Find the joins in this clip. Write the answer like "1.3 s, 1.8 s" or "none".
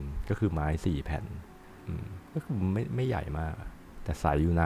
1.7 s